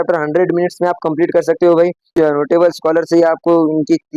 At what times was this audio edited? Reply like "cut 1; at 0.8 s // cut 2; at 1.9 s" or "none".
cut 1; at 2.1 s